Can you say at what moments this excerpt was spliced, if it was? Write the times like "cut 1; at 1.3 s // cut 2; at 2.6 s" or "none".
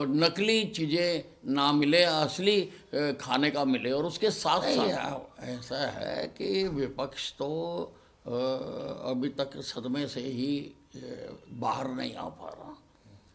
cut 1; at 4.6 s